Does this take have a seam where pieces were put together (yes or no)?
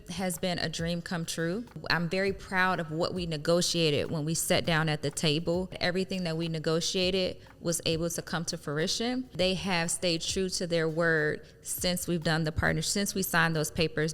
yes